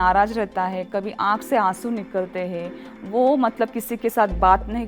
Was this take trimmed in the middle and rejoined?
no; 0 cuts

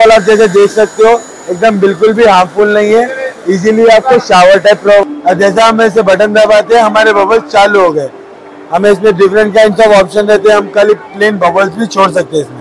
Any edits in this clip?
yes; 1 cut; at 5.1 s

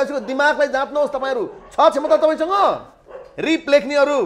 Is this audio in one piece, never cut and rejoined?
yes; 0 cuts

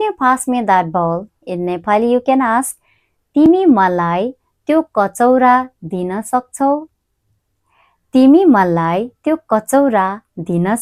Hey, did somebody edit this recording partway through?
no; 0 cuts

